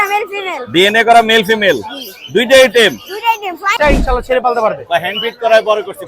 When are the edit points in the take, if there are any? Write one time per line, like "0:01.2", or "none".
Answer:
0:03.7